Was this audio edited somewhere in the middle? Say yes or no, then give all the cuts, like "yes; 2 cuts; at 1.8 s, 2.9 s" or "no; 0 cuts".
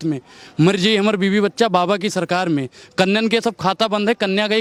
no; 0 cuts